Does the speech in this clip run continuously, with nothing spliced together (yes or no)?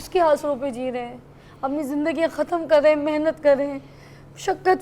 yes